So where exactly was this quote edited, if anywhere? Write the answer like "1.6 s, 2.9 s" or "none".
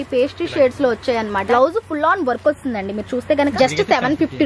1.4 s, 3.5 s